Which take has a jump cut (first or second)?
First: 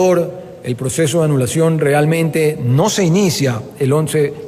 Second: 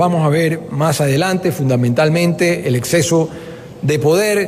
first